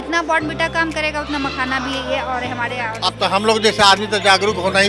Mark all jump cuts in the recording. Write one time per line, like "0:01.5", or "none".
0:02.9